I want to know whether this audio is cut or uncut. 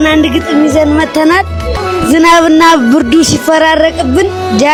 uncut